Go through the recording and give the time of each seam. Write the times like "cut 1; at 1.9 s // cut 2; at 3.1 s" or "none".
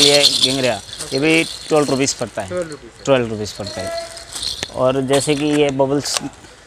none

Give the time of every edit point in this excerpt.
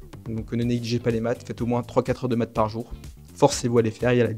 none

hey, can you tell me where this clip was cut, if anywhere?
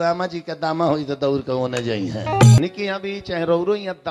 cut 1; at 2.6 s

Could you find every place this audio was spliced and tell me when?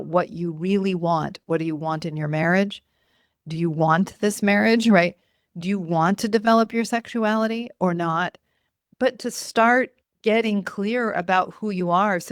none

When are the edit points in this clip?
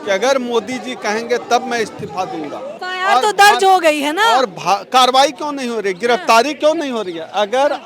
cut 1; at 2.9 s

